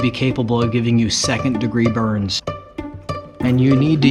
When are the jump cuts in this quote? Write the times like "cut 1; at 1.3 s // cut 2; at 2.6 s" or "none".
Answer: none